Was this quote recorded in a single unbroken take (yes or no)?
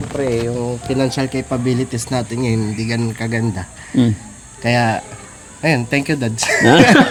yes